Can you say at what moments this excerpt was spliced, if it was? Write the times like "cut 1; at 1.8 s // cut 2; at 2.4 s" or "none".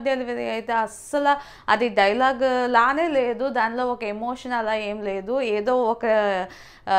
none